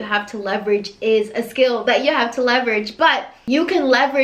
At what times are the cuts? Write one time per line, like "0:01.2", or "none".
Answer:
0:03.3